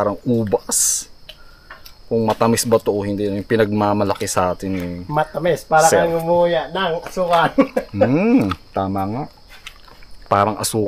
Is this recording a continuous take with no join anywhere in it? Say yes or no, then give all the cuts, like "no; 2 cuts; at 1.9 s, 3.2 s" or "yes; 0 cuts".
yes; 0 cuts